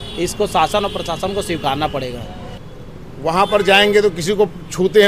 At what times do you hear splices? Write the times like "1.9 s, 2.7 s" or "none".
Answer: 2.5 s